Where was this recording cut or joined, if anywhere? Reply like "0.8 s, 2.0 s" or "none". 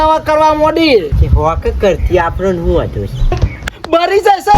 1.1 s, 3.4 s